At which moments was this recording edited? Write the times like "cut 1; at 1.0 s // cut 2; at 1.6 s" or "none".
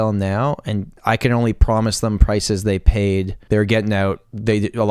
cut 1; at 1.0 s // cut 2; at 3.4 s